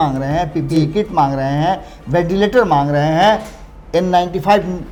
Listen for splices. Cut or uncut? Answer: uncut